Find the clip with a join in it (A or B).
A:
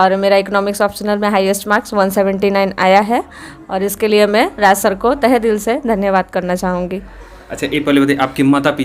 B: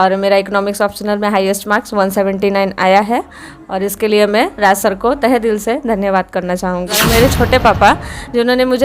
B